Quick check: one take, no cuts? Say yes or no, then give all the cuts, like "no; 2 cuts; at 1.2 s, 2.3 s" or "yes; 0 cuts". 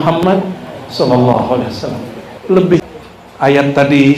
no; 1 cut; at 2.9 s